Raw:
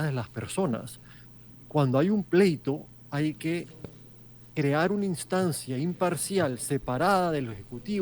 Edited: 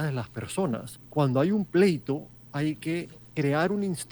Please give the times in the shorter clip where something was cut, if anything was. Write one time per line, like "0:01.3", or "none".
0:01.0
0:03.2